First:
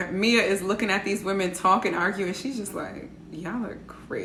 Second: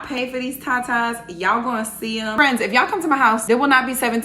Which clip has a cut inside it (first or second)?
second